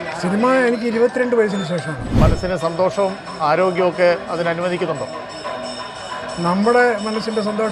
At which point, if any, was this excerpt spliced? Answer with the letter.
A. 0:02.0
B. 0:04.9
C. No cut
A